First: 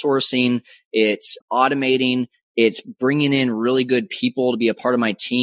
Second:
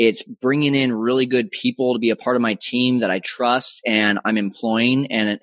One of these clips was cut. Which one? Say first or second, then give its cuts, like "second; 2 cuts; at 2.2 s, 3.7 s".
first; 1 cut; at 1.4 s